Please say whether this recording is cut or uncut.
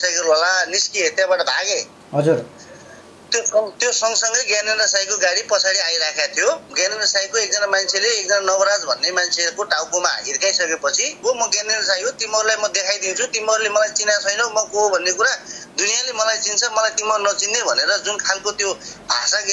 cut